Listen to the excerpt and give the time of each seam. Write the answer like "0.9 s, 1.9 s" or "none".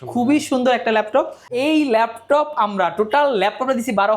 1.4 s